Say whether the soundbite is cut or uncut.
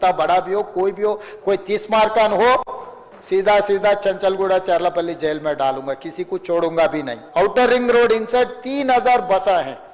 cut